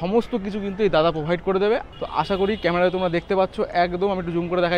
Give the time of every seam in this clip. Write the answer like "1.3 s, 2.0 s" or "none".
1.9 s